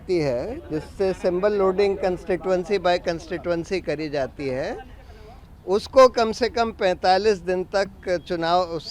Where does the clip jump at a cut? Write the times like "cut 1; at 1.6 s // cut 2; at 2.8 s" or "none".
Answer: none